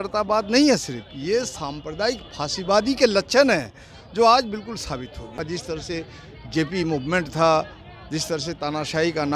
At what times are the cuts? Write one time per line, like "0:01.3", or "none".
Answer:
0:05.4

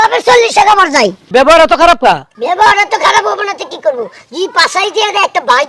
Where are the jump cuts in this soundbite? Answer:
0:01.2
0:02.3

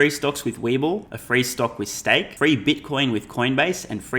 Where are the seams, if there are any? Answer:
0:01.1
0:02.3

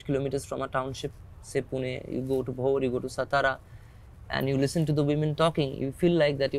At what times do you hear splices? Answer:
none

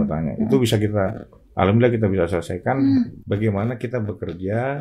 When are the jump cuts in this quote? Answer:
0:03.2

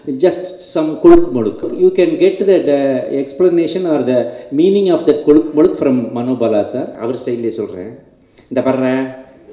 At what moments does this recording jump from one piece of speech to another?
0:01.7
0:07.0

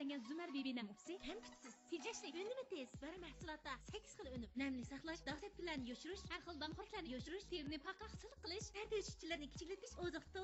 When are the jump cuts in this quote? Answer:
0:01.2

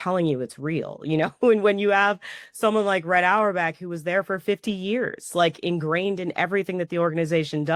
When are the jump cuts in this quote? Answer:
none

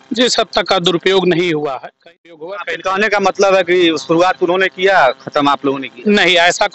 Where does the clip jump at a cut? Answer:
0:02.1

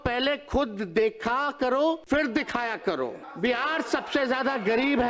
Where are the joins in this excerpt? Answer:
0:02.0
0:03.2

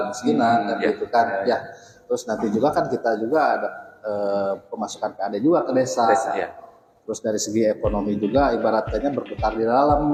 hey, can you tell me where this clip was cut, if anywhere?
none

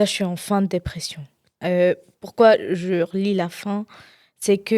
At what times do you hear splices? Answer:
none

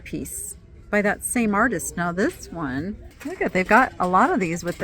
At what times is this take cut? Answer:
0:03.1

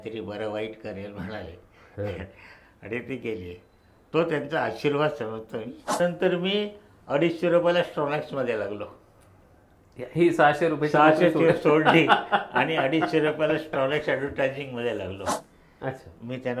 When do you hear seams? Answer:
0:06.0
0:15.3

